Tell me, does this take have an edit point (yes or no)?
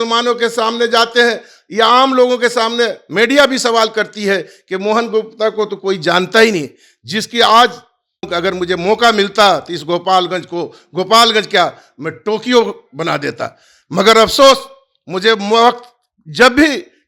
yes